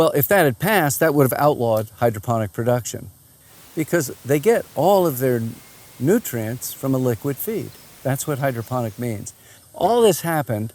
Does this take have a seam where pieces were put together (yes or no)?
yes